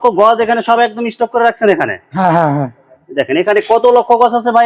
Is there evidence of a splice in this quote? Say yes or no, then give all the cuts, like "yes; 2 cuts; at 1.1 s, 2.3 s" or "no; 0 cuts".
no; 0 cuts